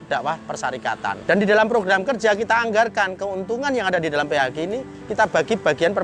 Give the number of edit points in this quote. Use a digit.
0